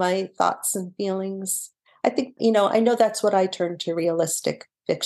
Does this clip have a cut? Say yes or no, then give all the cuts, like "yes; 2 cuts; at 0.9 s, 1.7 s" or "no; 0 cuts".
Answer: yes; 1 cut; at 2.3 s